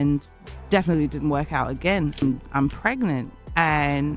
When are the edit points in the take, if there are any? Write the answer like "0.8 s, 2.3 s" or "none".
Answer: 2.1 s